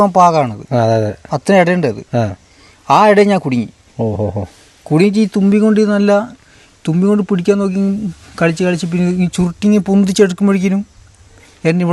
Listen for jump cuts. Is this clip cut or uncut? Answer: uncut